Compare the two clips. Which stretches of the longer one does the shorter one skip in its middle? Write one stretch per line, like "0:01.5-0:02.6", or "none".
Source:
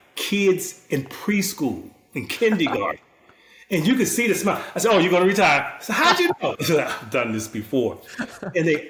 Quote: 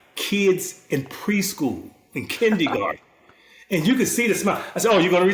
none